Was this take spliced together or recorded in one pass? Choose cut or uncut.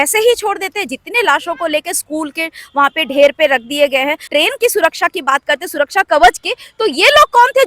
cut